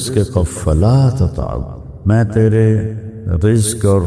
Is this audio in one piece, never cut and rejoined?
yes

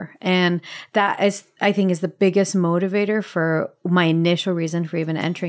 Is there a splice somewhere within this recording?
no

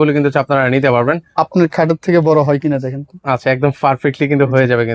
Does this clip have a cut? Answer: yes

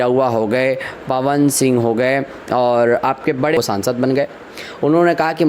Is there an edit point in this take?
yes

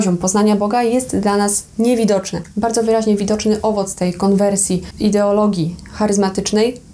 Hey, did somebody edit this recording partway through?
yes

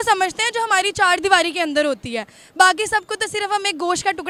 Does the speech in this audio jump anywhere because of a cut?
no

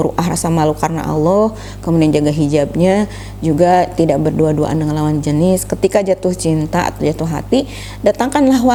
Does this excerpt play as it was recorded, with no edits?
yes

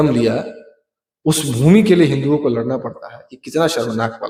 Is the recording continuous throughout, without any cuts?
yes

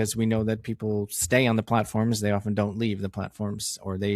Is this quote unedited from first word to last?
yes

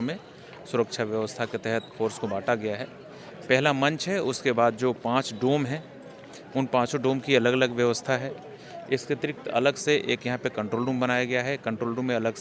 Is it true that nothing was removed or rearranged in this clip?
yes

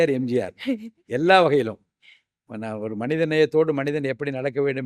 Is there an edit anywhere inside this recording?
no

